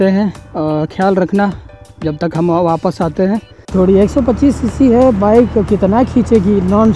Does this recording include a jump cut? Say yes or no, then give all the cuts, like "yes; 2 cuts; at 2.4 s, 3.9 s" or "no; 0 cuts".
yes; 1 cut; at 3.7 s